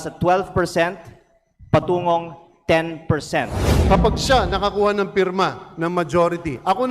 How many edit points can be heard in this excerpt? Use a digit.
1